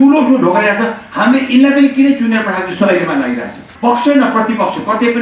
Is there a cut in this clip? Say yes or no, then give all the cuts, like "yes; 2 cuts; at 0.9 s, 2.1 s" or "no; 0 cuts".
yes; 1 cut; at 3.7 s